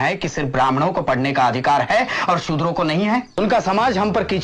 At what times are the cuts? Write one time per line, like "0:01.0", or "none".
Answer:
0:03.4